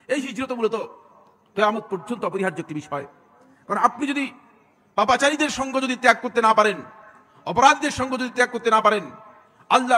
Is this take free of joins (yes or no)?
yes